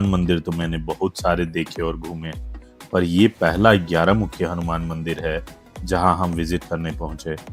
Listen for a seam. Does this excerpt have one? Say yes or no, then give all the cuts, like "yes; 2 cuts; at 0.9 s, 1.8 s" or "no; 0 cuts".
no; 0 cuts